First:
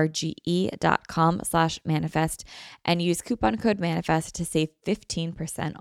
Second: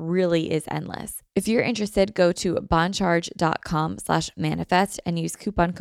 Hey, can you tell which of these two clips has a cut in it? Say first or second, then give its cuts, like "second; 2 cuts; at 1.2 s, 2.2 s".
second; 1 cut; at 1.1 s